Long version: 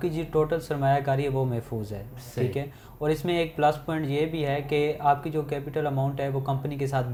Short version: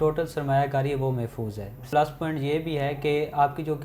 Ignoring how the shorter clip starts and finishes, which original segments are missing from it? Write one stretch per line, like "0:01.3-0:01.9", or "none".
0:02.2-0:03.5